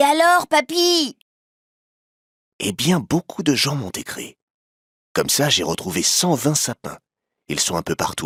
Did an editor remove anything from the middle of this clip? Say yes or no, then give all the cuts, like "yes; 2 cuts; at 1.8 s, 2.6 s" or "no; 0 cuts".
no; 0 cuts